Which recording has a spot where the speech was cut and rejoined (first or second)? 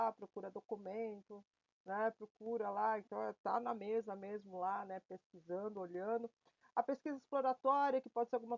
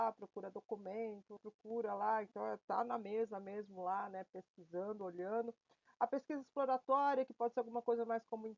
second